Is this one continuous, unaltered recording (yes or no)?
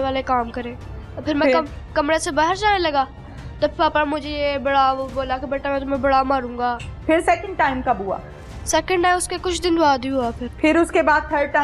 no